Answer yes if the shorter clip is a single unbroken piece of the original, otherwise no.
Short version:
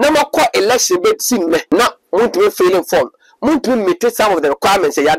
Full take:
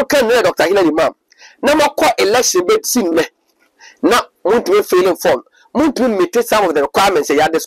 no